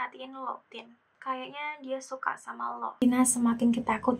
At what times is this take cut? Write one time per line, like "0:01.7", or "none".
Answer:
none